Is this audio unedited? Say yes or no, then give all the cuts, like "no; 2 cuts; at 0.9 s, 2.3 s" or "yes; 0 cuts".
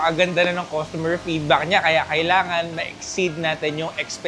yes; 0 cuts